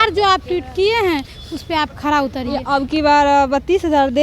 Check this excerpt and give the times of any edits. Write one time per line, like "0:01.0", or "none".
0:02.6